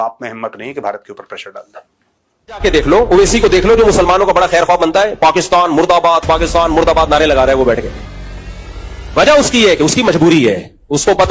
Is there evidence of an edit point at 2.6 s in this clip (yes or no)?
yes